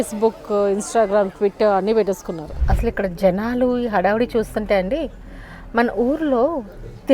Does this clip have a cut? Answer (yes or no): yes